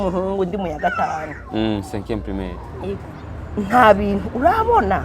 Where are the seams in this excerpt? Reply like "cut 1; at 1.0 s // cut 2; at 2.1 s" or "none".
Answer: cut 1; at 3.0 s